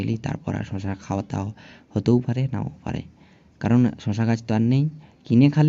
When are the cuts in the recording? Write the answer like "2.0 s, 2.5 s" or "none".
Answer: none